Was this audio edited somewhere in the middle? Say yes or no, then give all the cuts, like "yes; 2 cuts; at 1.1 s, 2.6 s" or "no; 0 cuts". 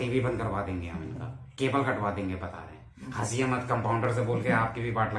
no; 0 cuts